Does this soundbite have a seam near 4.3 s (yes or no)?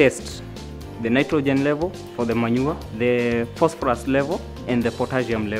no